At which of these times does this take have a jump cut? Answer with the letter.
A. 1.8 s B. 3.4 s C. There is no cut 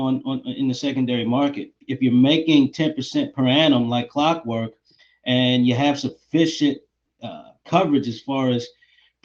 A